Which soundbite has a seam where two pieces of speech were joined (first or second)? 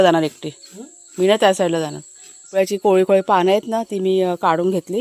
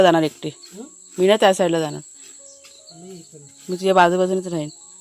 first